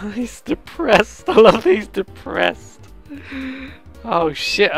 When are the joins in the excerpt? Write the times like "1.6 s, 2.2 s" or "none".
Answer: none